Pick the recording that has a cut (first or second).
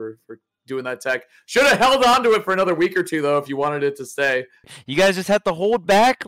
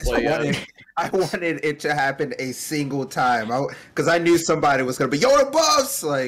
first